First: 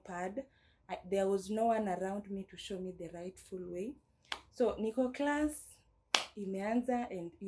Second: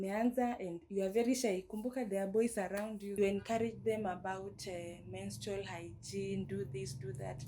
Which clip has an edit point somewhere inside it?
second; 1 cut; at 3.2 s

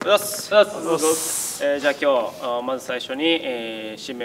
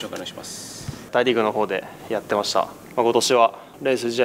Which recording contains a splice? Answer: second; 2 cuts; at 1.1 s, 2.8 s

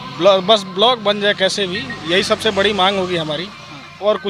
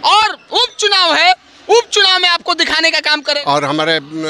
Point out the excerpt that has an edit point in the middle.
second; 1 cut; at 3.4 s

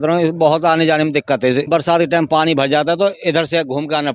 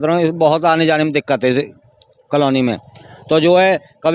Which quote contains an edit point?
first; 1 cut; at 1.7 s

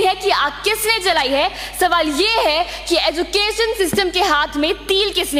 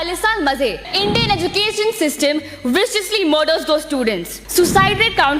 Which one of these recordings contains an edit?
second; 2 cuts; at 0.9 s, 4.3 s

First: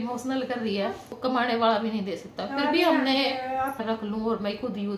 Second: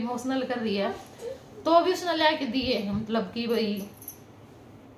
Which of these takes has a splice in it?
first; 2 cuts; at 1.1 s, 3.8 s

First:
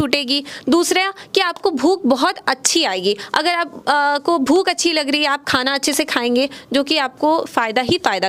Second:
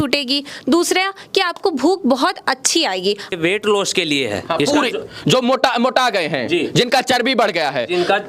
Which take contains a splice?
second; 1 cut; at 3.3 s

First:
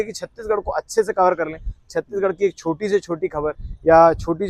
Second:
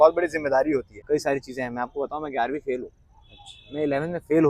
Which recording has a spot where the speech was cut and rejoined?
second; 1 cut; at 0.9 s

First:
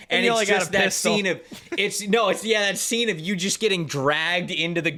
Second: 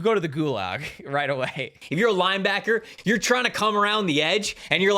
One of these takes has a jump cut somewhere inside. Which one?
second; 2 cuts; at 1.7 s, 2.9 s

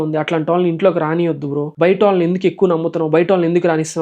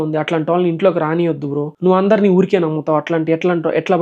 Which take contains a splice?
first; 1 cut; at 1.7 s

